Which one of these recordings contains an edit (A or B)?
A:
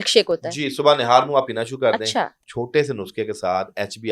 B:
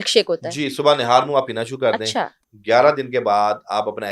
A